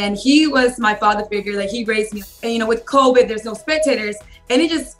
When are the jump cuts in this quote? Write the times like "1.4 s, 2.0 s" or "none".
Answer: 2.2 s